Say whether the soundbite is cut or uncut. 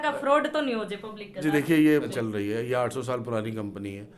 cut